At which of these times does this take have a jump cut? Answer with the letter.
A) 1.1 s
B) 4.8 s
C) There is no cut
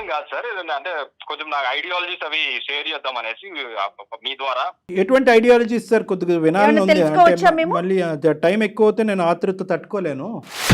B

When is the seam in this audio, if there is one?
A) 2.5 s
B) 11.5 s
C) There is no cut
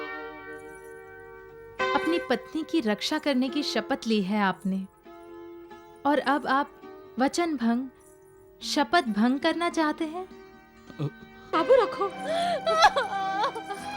B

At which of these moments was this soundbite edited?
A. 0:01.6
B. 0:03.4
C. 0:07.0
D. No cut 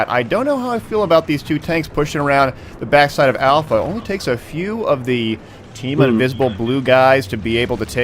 D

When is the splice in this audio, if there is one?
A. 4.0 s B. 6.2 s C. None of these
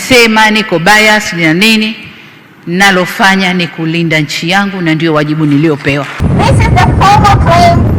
B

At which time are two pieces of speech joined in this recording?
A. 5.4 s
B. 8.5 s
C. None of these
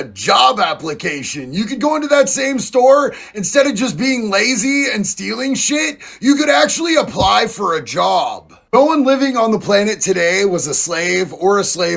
B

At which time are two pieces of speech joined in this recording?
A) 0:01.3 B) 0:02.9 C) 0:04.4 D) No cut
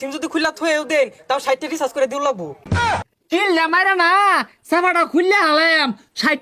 B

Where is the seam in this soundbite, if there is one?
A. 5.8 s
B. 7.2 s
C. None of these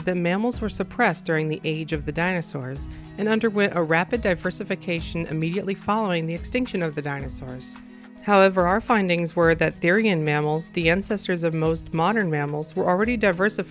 A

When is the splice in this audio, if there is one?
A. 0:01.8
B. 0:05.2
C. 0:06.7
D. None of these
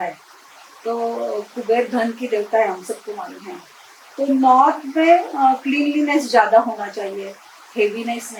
D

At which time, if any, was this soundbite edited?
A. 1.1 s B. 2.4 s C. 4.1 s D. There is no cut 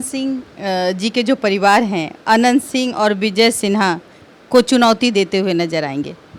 D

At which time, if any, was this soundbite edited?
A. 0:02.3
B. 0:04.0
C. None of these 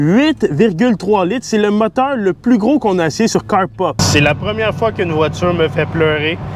B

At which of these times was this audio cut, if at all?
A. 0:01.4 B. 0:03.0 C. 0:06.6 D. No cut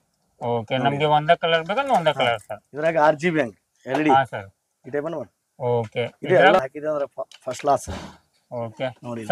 C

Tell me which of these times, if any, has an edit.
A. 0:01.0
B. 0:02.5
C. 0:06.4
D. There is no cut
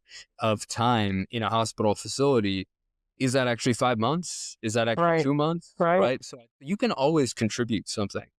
C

